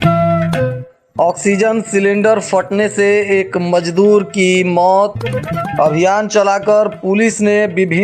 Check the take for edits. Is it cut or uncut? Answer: cut